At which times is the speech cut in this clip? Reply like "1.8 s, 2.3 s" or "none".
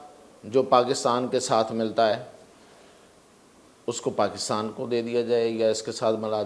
none